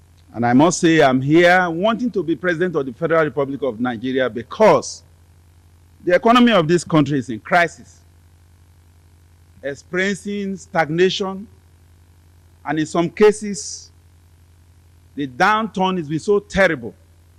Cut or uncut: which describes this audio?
uncut